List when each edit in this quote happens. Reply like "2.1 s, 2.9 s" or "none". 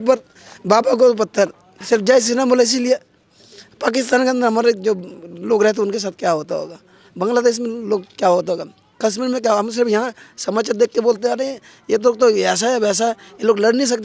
none